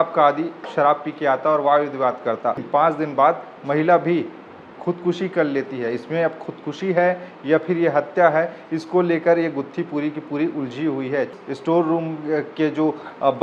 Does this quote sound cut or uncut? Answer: cut